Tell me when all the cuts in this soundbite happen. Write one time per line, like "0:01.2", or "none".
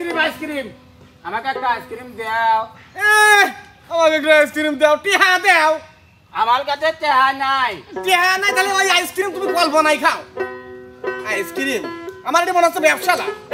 none